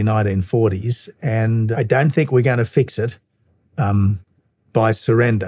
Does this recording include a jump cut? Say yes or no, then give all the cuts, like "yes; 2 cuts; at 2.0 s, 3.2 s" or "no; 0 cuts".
yes; 1 cut; at 1.7 s